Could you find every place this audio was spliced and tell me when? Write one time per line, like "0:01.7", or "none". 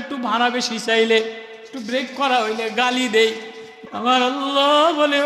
0:03.8